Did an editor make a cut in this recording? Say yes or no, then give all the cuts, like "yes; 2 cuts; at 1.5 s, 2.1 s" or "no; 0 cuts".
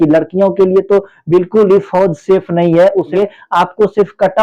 yes; 1 cut; at 3.1 s